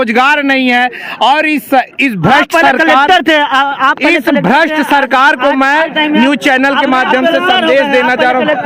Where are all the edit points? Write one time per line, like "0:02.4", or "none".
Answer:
none